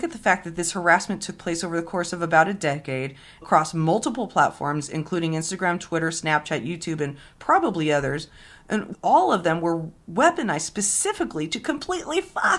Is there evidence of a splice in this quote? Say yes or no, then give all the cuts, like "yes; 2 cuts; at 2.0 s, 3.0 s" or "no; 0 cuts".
yes; 2 cuts; at 3.4 s, 8.9 s